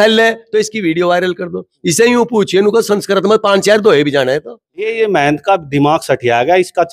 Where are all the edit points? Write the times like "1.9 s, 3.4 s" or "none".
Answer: 4.8 s